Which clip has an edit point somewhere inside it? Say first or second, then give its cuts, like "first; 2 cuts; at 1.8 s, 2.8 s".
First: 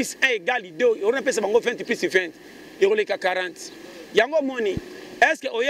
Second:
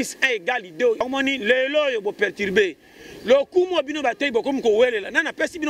second; 1 cut; at 1.0 s